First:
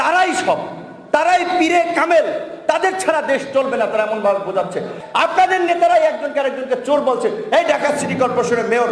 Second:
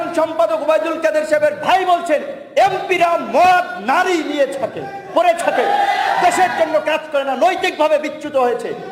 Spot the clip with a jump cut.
first; 1 cut; at 5.0 s

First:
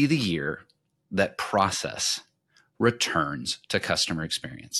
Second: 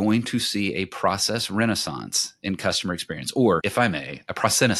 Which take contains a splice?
second; 1 cut; at 3.6 s

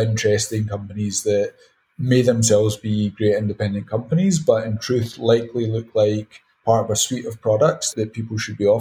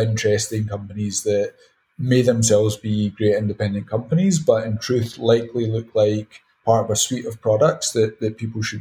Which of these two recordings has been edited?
first; 1 cut; at 7.9 s

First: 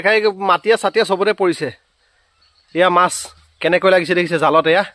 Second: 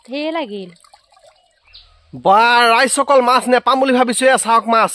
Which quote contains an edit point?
second; 1 cut; at 1.9 s

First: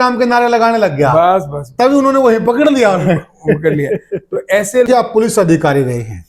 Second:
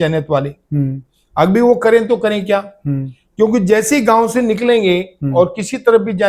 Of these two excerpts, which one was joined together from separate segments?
first; 1 cut; at 4.9 s

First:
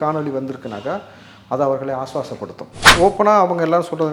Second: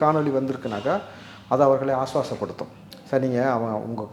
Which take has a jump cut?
first; 1 cut; at 2.8 s

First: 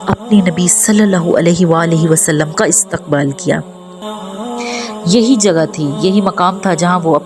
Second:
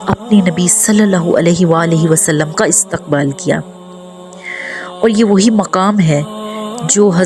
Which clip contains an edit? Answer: first; 1 cut; at 4.1 s

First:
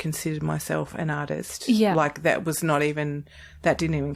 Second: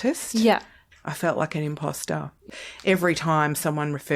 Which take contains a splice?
second; 2 cuts; at 0.9 s, 2.4 s

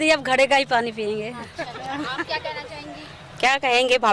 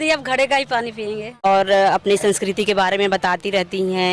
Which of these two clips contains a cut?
second; 1 cut; at 1.4 s

